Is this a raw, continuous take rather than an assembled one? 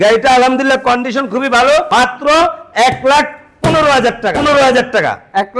no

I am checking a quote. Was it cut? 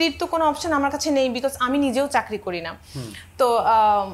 no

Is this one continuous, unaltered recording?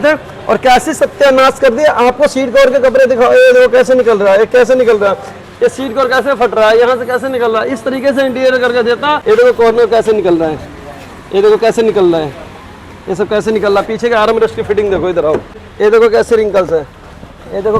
no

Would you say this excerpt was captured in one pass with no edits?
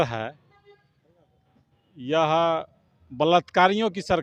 yes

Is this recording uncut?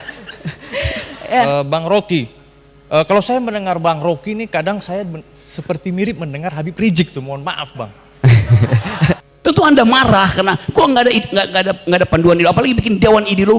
no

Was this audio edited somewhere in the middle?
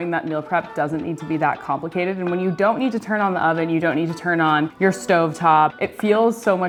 no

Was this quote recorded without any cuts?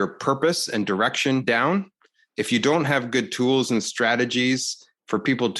no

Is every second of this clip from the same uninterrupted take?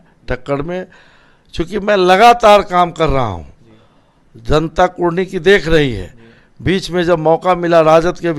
yes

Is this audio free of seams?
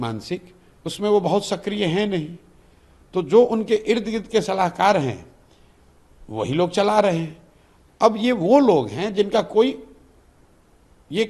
yes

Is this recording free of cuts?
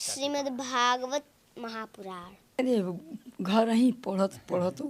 no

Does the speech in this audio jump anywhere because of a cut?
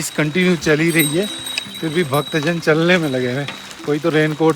no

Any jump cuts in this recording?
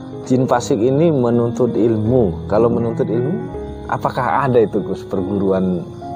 no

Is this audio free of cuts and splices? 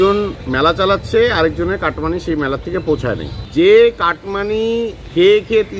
no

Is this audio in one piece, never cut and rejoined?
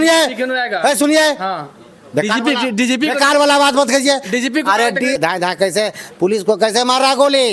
no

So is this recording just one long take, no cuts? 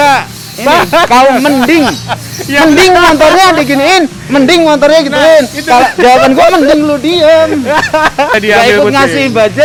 yes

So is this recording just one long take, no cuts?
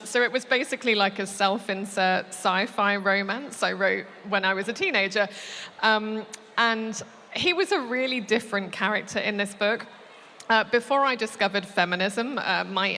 yes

